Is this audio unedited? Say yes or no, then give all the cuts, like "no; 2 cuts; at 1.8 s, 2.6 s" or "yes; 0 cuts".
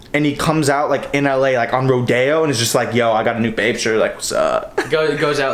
yes; 0 cuts